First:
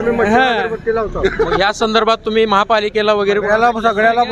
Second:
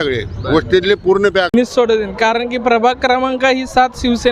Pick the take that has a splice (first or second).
second